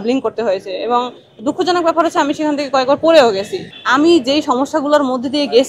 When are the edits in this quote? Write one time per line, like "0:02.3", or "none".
0:03.6